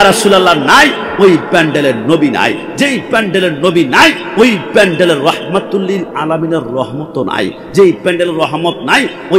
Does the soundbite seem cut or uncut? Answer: uncut